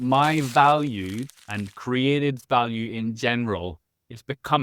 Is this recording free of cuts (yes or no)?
yes